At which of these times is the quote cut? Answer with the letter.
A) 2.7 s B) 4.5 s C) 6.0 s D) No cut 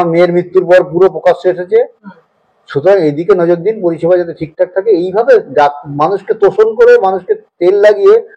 D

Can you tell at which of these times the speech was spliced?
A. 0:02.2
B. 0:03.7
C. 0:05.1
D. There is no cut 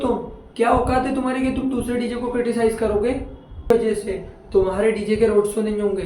B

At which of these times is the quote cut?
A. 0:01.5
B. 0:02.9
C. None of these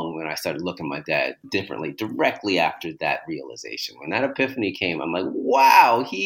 A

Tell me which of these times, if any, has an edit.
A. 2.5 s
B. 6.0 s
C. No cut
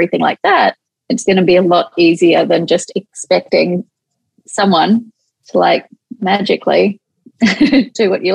C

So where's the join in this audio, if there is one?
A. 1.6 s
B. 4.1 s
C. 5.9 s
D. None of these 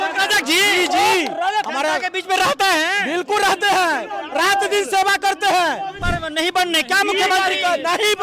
C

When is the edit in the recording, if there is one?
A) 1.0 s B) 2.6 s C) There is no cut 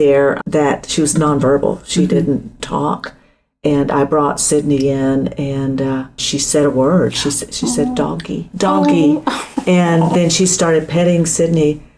B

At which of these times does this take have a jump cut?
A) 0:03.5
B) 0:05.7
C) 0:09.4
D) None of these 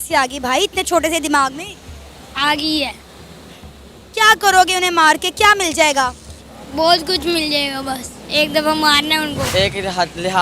C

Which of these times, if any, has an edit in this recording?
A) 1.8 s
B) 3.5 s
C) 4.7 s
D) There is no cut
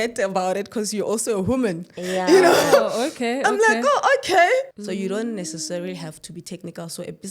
C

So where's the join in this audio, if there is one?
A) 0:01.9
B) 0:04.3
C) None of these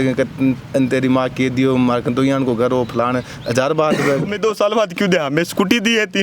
B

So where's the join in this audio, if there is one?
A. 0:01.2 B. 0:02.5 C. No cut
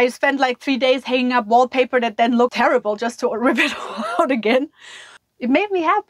B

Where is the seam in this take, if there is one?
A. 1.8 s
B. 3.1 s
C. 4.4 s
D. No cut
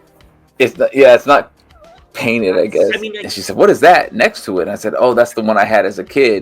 B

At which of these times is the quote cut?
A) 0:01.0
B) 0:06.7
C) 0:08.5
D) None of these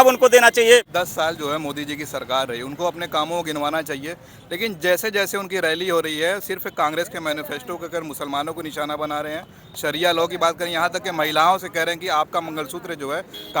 A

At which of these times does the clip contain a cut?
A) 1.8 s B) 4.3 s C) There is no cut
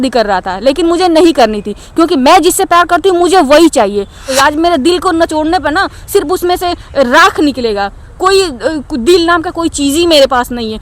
B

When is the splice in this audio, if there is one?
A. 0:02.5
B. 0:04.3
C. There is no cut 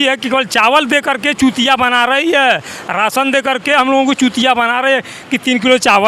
C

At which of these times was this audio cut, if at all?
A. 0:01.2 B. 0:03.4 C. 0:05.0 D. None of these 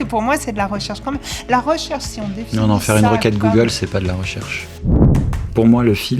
C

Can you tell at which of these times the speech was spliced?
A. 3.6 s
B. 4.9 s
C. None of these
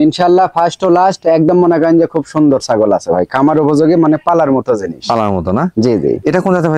C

